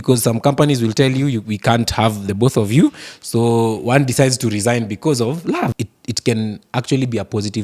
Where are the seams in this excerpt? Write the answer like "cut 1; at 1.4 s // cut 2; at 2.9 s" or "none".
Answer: cut 1; at 5.8 s